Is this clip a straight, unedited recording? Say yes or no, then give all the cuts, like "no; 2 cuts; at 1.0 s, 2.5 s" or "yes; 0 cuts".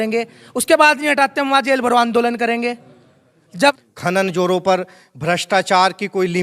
no; 1 cut; at 3.8 s